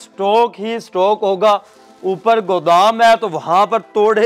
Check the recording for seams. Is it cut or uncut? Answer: uncut